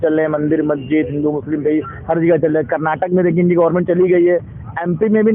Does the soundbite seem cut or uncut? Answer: uncut